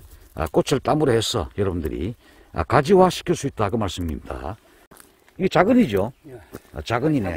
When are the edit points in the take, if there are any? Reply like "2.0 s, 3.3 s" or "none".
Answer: 4.7 s